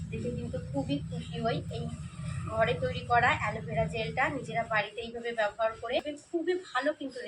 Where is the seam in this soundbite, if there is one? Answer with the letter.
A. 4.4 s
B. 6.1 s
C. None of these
B